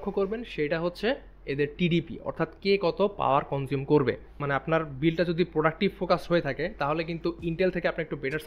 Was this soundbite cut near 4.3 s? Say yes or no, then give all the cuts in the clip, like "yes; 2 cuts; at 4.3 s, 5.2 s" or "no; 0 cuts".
yes; 1 cut; at 4.3 s